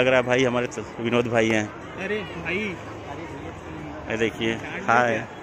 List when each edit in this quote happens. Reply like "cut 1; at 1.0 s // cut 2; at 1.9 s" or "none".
none